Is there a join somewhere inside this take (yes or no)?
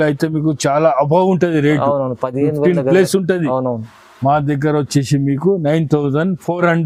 no